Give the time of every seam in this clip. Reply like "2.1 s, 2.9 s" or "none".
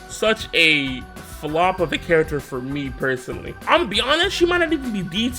3.6 s